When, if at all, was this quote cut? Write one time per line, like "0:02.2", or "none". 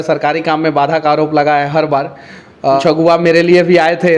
0:02.8